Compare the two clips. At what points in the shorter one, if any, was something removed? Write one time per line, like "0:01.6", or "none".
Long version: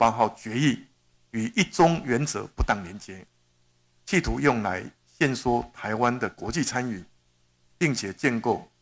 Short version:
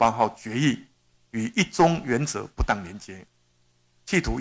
none